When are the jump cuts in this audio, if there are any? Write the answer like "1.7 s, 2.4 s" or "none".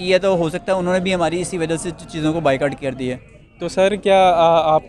none